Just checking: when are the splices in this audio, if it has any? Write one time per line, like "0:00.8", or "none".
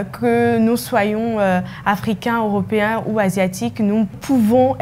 none